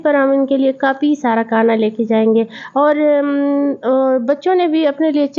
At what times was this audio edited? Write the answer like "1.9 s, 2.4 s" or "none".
none